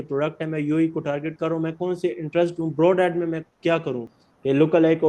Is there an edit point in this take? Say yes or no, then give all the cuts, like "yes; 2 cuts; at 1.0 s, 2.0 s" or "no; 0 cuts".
yes; 1 cut; at 4.1 s